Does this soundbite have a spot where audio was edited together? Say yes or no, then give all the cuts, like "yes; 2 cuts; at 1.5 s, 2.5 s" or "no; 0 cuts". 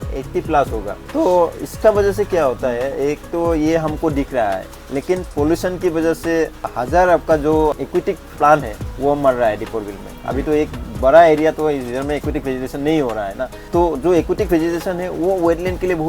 no; 0 cuts